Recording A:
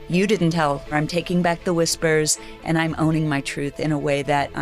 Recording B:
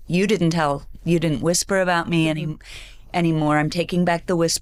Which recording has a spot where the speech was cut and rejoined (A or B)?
A